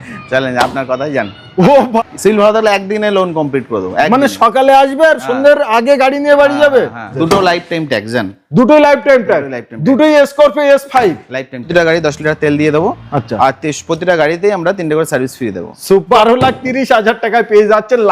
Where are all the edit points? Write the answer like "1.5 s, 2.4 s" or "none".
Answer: 2.0 s, 7.1 s, 11.6 s, 16.1 s